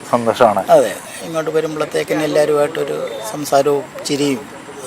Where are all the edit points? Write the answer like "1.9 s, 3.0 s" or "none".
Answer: 1.1 s